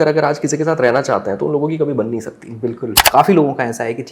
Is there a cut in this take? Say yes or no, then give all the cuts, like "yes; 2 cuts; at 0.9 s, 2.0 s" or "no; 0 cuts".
yes; 1 cut; at 3.0 s